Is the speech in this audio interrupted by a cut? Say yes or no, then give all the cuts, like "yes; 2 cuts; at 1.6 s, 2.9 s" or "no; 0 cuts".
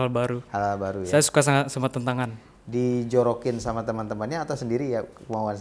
no; 0 cuts